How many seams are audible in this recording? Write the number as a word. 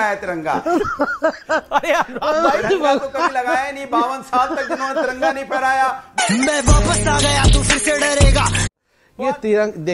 one